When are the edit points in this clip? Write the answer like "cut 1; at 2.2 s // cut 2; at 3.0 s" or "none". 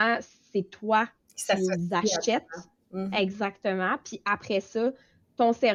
none